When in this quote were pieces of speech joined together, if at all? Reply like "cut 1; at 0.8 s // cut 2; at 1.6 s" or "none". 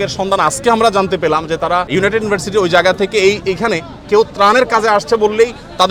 cut 1; at 1.9 s